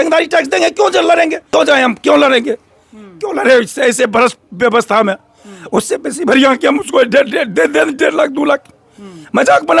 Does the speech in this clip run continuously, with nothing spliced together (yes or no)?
no